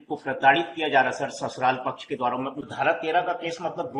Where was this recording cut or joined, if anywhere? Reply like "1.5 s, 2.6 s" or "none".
2.7 s